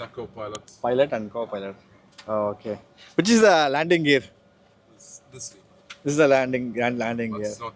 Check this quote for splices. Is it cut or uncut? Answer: uncut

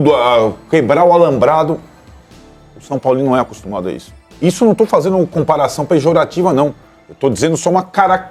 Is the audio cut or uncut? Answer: uncut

